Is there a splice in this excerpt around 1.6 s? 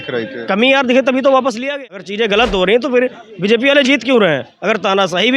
yes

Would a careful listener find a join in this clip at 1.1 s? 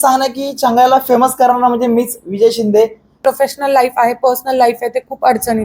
no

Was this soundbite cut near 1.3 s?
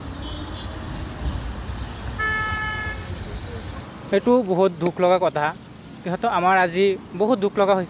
yes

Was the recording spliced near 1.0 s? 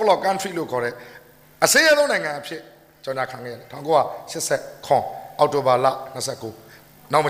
no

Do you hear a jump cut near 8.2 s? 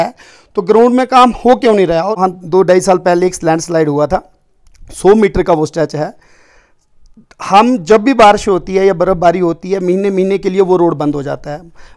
no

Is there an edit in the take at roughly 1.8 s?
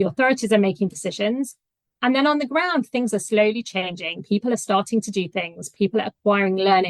no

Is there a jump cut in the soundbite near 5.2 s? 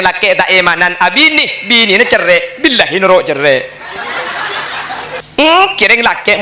yes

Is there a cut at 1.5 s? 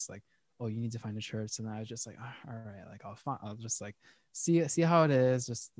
no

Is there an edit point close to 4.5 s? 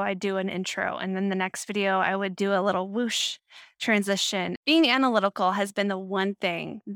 yes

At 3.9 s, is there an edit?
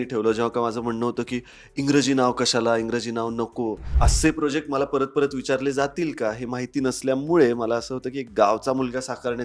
yes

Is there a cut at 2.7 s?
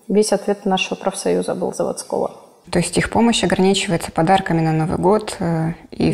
yes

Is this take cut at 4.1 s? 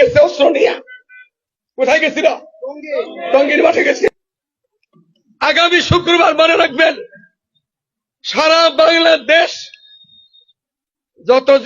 yes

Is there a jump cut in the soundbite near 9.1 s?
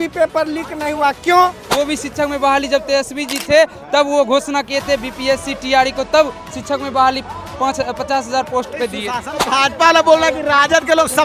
yes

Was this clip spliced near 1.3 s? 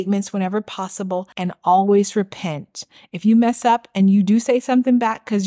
yes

